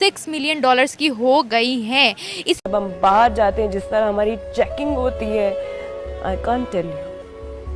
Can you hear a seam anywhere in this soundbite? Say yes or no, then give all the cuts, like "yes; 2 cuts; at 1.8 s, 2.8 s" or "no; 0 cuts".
yes; 1 cut; at 2.6 s